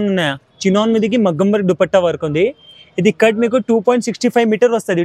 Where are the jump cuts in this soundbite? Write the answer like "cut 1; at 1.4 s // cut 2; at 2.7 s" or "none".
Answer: none